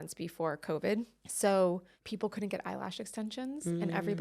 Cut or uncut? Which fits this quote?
cut